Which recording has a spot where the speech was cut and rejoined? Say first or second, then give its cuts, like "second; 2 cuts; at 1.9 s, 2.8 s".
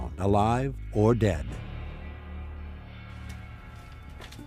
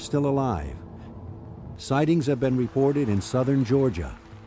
first; 1 cut; at 1.1 s